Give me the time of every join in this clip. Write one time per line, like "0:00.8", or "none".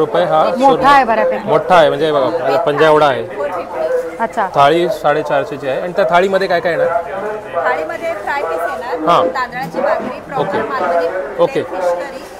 none